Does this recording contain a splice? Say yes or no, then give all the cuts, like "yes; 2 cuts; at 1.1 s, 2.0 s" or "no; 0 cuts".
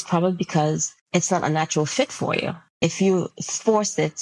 yes; 2 cuts; at 0.9 s, 2.6 s